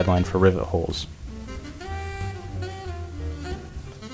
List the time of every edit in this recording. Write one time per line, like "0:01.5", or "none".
0:01.1